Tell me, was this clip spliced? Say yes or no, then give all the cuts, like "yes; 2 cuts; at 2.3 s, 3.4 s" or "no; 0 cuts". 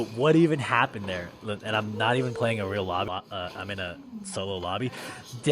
yes; 1 cut; at 3.1 s